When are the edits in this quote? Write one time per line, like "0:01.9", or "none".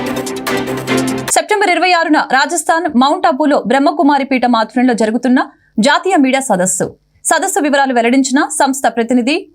0:01.3